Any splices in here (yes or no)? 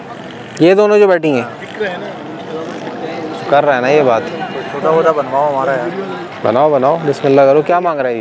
no